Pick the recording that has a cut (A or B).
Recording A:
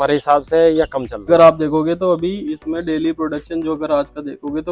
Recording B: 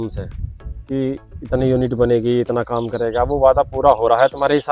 A